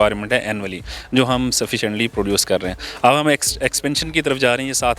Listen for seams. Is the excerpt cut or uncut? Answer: uncut